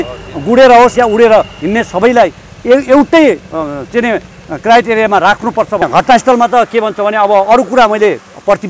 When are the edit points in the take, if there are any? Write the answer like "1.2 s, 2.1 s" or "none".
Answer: 5.8 s